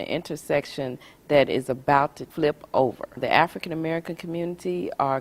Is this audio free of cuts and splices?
no; 2 cuts; at 2.2 s, 3.2 s

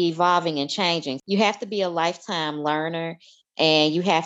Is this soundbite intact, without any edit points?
no; 1 cut; at 1.2 s

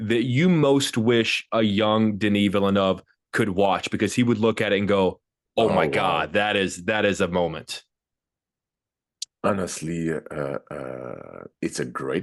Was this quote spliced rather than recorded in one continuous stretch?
no; 0 cuts

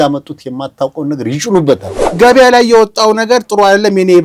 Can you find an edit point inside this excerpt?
yes; 1 cut; at 2.2 s

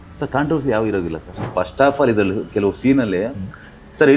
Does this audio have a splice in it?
yes; 1 cut; at 1.5 s

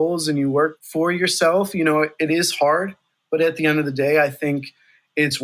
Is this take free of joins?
yes; 0 cuts

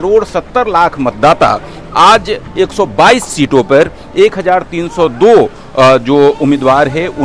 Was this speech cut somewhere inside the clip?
no; 0 cuts

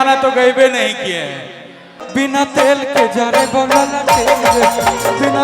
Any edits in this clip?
yes; 1 cut; at 2.0 s

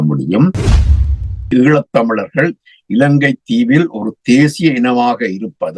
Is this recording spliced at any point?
yes; 1 cut; at 1.1 s

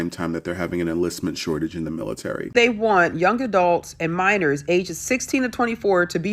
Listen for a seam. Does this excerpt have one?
yes; 1 cut; at 2.4 s

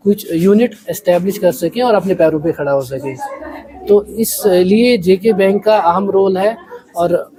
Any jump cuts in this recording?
no; 0 cuts

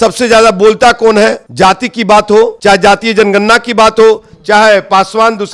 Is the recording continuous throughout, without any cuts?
no; 2 cuts; at 1.4 s, 2.5 s

